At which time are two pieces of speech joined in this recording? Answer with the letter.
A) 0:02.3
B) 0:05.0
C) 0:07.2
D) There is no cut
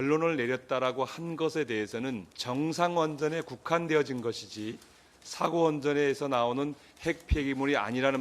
A